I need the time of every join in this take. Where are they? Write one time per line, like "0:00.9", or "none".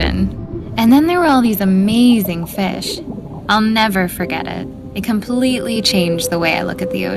none

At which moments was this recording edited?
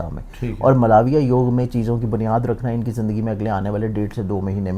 none

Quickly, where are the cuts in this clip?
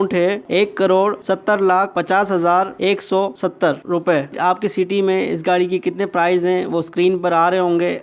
0:06.7

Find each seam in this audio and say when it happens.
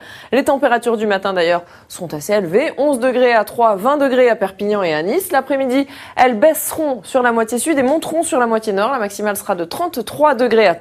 0:08.3

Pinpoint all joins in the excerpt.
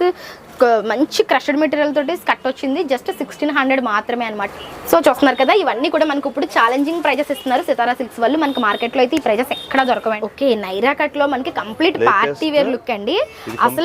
0:04.5
0:10.2

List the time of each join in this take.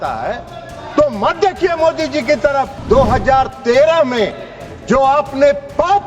0:02.8

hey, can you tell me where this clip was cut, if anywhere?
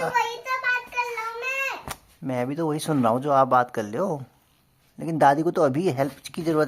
none

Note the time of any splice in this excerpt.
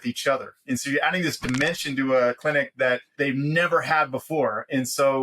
0:02.7

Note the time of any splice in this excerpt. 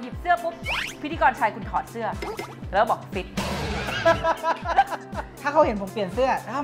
0:05.3

